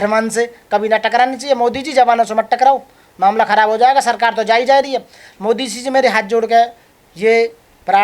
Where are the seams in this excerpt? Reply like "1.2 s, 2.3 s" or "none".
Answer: none